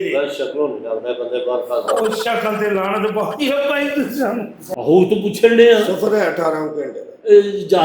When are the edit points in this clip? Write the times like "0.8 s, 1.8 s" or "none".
4.6 s